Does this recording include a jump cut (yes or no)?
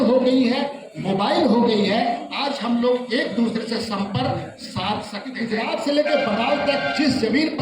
yes